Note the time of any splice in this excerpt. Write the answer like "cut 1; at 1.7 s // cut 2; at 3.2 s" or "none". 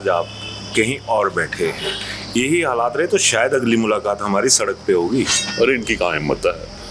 cut 1; at 5.4 s